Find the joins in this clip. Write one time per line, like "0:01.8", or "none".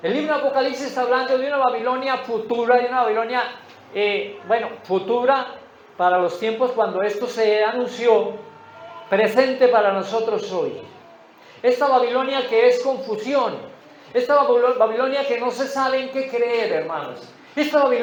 none